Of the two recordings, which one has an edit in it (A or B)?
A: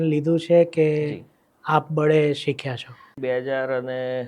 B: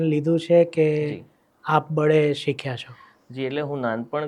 A